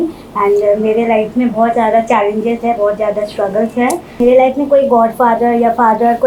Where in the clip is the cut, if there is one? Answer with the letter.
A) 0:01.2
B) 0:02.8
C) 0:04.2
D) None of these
C